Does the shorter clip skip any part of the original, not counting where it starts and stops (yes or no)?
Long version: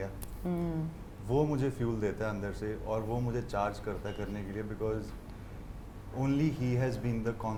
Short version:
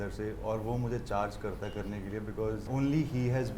yes